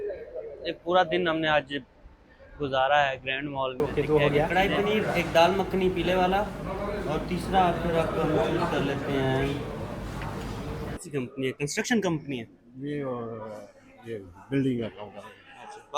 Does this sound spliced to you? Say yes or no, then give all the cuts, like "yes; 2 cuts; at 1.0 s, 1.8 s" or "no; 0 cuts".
yes; 2 cuts; at 3.8 s, 11.0 s